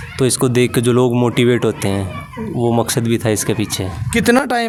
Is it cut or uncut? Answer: uncut